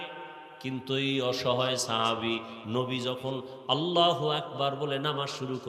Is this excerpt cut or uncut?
uncut